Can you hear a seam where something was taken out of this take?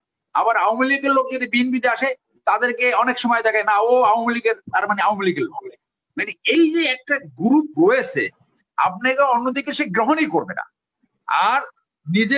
no; 0 cuts

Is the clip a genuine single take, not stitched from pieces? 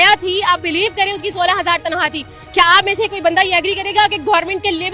yes; 0 cuts

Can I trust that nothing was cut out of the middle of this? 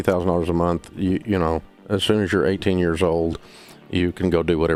yes; 0 cuts

